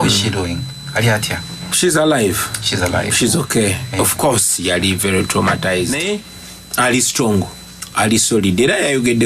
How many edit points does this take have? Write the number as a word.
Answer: one